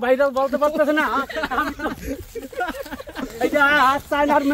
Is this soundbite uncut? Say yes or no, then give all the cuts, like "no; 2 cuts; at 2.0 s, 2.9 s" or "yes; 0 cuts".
no; 1 cut; at 3.2 s